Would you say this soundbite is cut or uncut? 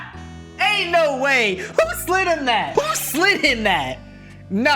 cut